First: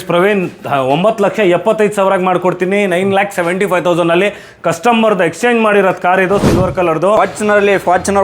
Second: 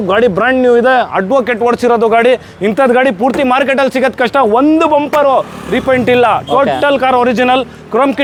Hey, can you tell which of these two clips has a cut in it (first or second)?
first